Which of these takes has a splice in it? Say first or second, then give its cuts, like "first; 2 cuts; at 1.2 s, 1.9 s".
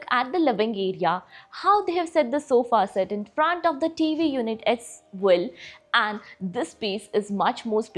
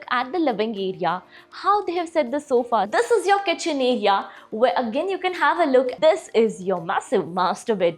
second; 2 cuts; at 2.9 s, 5.9 s